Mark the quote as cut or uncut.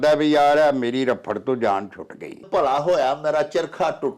cut